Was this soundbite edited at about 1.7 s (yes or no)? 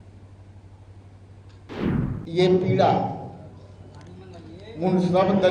yes